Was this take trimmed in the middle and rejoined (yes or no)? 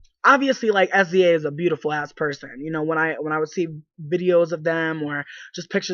yes